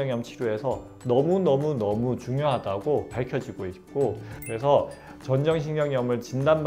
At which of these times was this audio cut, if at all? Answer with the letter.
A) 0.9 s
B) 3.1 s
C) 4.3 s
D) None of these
C